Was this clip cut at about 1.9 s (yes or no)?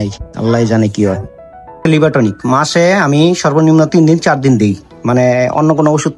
yes